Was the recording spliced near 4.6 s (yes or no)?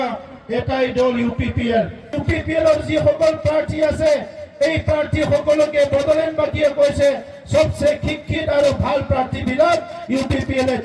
no